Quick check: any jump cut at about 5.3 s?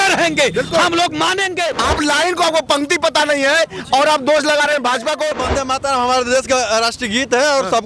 yes; 2 cuts; at 1.7 s, 5.3 s

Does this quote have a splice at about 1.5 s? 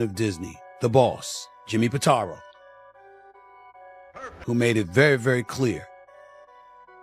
no; 2 cuts; at 3.0 s, 4.4 s

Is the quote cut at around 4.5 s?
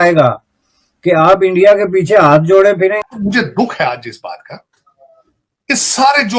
no; 1 cut; at 3.0 s

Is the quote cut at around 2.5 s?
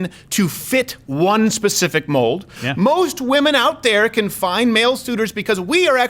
yes; 1 cut; at 2.5 s

